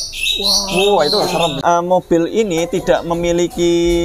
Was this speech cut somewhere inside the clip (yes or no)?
yes